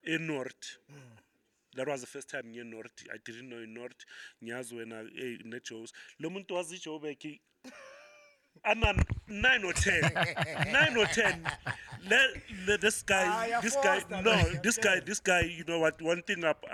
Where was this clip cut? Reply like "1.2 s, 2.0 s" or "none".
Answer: none